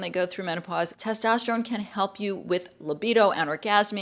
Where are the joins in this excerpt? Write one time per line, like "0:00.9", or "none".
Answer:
0:01.0